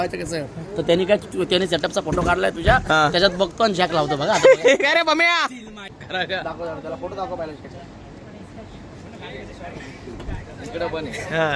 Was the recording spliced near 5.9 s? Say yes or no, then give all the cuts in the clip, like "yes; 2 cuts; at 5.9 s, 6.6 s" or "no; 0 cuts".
yes; 1 cut; at 5.9 s